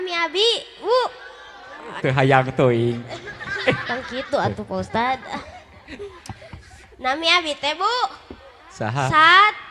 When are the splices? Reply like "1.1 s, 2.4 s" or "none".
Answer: 2.0 s

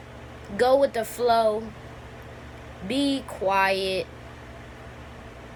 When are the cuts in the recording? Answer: none

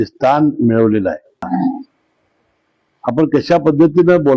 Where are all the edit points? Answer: 1.5 s

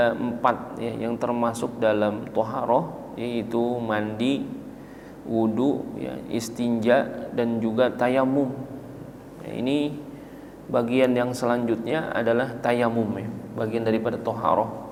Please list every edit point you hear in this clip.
none

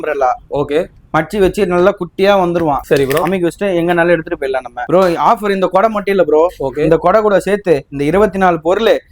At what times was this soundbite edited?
2.8 s, 4.8 s

